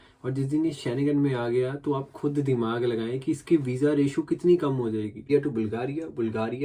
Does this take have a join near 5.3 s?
yes; 1 cut; at 5.3 s

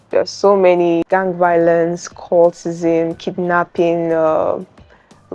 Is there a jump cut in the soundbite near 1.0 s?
yes; 1 cut; at 1.0 s

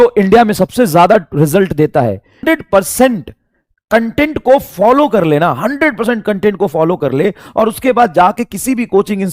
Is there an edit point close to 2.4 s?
yes; 1 cut; at 2.4 s

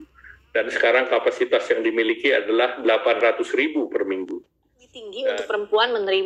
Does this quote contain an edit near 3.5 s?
no; 1 cut; at 5.0 s

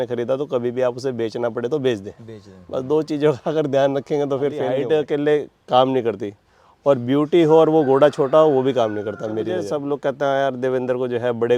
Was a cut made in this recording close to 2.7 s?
no; 2 cuts; at 4.8 s, 9.6 s

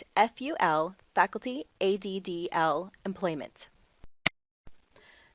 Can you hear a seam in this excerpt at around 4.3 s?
yes; 1 cut; at 4.3 s

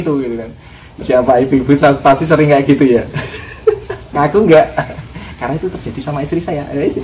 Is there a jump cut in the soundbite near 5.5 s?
no; 1 cut; at 1.0 s

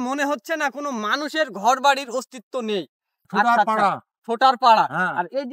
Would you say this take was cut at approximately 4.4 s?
no; 1 cut; at 3.2 s

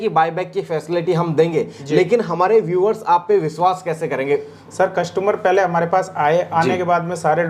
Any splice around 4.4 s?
no; 0 cuts

